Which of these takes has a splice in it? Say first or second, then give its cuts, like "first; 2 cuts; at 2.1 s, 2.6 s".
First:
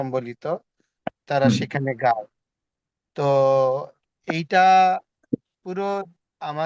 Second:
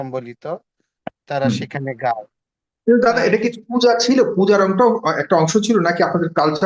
second; 1 cut; at 2.7 s